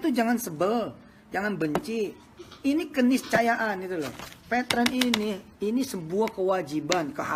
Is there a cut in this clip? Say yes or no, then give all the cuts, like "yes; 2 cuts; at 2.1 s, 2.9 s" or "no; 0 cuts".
no; 0 cuts